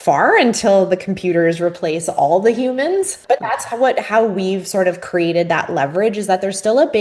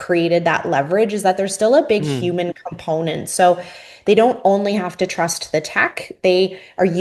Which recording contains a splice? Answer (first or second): first